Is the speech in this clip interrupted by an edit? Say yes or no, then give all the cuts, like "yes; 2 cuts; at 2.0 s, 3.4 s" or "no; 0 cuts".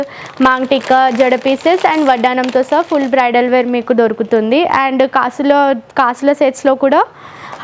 no; 0 cuts